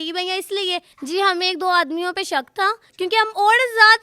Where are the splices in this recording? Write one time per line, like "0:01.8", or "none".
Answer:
0:00.9
0:02.8

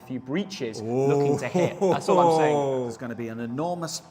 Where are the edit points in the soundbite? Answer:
0:02.9

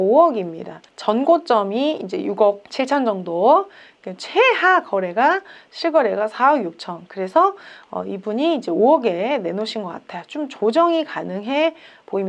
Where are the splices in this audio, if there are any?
none

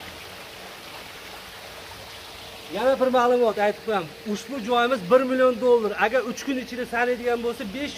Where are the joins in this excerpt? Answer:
none

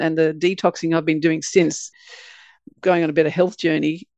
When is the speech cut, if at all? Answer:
0:01.9

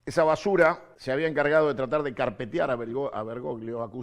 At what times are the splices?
0:00.9

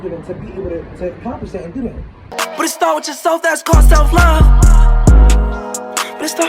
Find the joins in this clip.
0:02.3

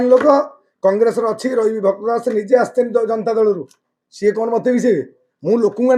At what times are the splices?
none

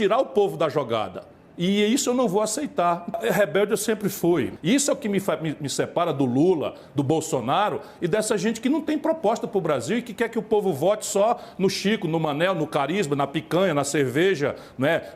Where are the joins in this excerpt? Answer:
0:03.2
0:04.5

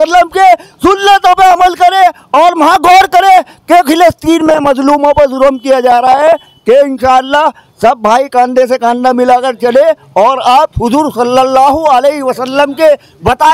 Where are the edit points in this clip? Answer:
none

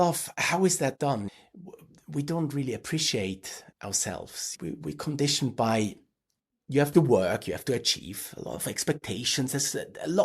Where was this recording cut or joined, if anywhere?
0:01.3

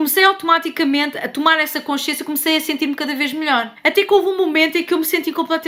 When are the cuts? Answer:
none

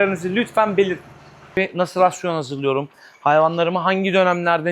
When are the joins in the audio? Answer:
0:01.6

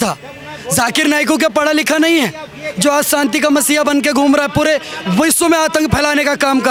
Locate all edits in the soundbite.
none

